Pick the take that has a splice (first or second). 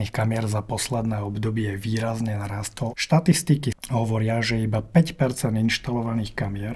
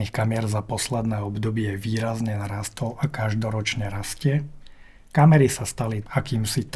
first